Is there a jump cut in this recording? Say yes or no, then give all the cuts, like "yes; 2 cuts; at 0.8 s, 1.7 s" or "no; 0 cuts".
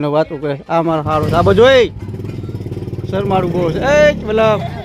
no; 0 cuts